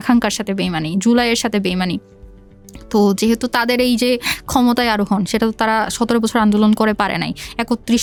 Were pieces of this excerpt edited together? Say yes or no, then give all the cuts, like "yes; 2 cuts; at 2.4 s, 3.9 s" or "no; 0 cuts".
no; 0 cuts